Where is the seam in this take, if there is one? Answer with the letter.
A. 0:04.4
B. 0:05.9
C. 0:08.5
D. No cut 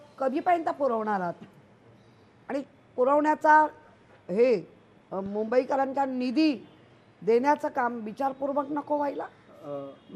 D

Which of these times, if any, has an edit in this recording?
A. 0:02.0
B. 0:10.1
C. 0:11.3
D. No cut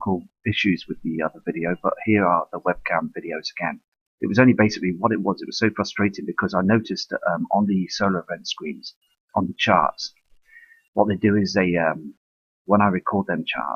C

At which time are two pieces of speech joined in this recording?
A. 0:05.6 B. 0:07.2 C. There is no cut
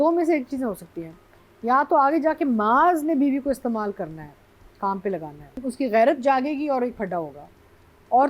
A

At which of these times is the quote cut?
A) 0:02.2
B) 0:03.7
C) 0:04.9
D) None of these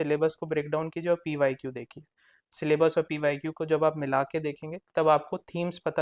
D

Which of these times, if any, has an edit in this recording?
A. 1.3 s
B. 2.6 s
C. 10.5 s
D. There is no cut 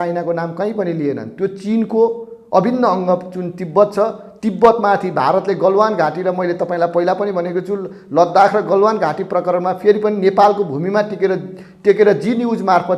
D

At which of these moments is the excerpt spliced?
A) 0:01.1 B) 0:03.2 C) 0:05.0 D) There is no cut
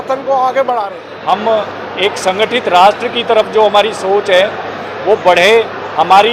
A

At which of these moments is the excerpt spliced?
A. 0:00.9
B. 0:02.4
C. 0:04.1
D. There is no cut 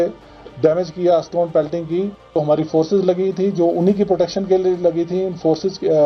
B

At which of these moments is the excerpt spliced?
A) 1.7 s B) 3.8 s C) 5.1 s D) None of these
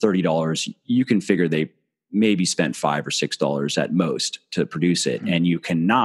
D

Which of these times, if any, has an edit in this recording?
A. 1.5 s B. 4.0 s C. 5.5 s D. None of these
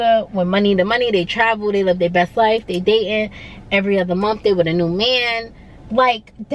D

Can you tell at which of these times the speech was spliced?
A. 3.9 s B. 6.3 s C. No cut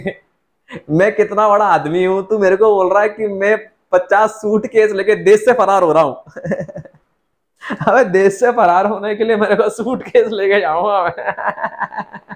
C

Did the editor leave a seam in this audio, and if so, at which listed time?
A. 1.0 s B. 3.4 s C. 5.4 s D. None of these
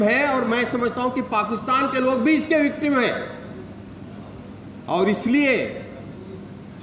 D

